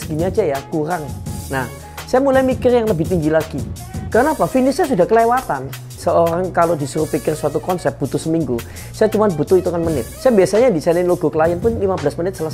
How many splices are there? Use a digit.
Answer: 2